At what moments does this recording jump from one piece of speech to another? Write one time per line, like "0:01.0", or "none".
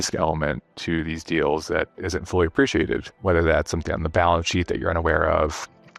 0:03.1